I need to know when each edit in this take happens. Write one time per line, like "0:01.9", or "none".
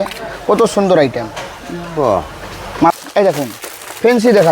0:02.9